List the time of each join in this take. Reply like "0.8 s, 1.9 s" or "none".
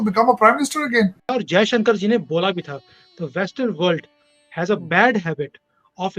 1.3 s

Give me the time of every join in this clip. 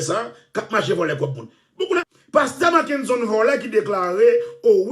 2.1 s

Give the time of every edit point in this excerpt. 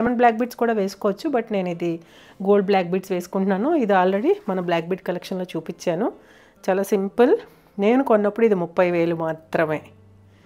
none

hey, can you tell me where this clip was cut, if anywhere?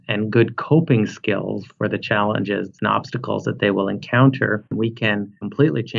5.1 s

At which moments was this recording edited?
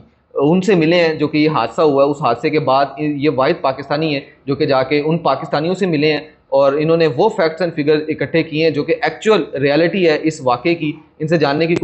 none

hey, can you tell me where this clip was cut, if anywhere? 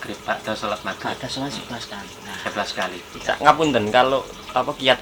3.1 s

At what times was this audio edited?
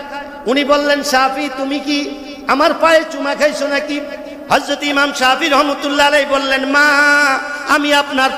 none

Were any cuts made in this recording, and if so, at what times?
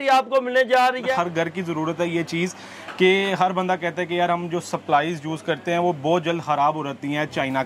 1.1 s

